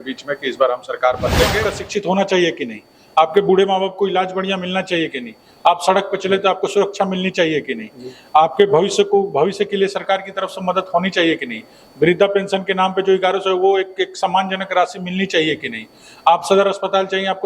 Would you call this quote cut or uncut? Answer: cut